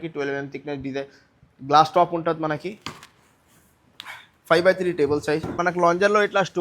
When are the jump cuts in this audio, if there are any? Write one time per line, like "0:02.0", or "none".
0:05.5

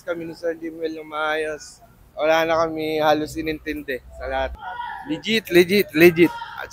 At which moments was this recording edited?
0:02.0
0:04.6

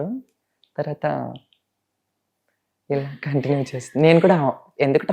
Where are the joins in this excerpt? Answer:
none

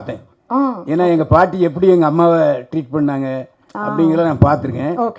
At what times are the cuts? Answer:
none

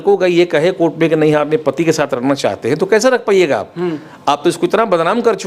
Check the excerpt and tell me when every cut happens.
none

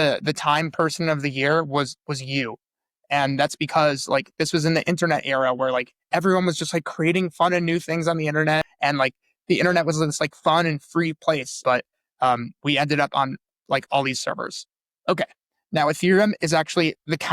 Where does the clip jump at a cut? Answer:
0:08.7
0:11.6

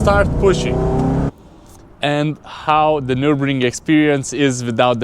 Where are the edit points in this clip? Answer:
0:01.3

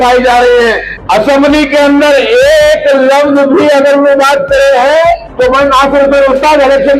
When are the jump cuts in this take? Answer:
0:00.9
0:05.3

